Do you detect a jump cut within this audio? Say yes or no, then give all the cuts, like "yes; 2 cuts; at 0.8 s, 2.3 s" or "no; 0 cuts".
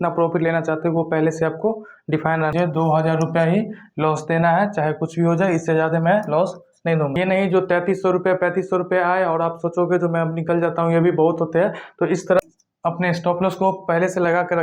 yes; 3 cuts; at 2.5 s, 7.1 s, 12.4 s